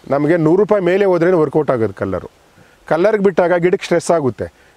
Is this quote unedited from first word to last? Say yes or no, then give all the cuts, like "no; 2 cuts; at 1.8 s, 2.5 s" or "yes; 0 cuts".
yes; 0 cuts